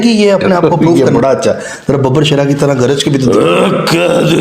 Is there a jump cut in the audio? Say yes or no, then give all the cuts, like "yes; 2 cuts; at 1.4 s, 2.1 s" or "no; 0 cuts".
yes; 1 cut; at 1.0 s